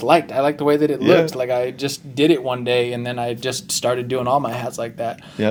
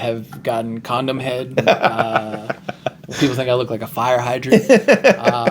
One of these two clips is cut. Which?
second; 3 cuts; at 1.5 s, 3.1 s, 4.4 s

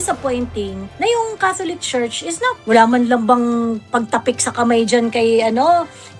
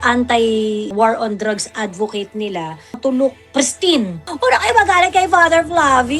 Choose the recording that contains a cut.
second; 3 cuts; at 0.9 s, 3.0 s, 4.2 s

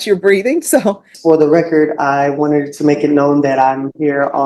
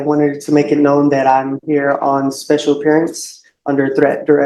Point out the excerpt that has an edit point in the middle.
first; 1 cut; at 1.1 s

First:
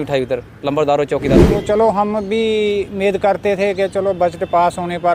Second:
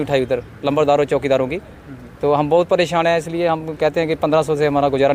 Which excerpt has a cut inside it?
first; 1 cut; at 1.4 s

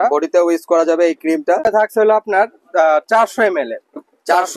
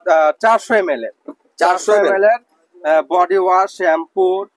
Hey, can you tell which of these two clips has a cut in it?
first; 1 cut; at 1.7 s

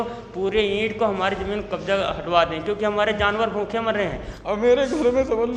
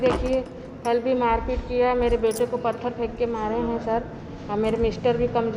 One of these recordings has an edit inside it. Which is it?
first; 1 cut; at 4.3 s

